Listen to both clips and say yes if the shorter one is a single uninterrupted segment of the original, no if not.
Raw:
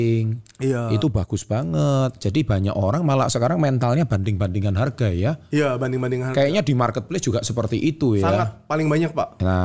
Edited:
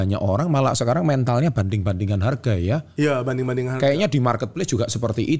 yes